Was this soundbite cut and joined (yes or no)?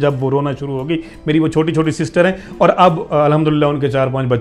no